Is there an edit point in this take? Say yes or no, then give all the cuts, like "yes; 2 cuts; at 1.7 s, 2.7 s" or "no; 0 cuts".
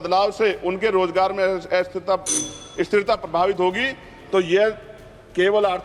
no; 0 cuts